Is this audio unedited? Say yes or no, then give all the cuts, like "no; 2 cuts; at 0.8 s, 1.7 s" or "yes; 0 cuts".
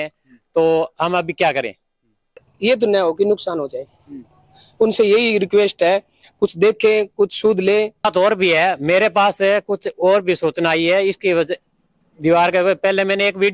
no; 2 cuts; at 2.5 s, 8.0 s